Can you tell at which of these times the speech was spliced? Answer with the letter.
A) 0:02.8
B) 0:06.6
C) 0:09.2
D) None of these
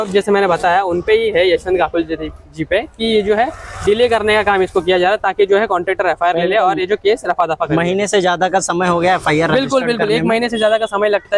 D